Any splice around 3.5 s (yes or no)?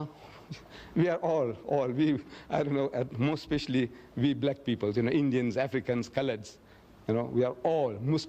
yes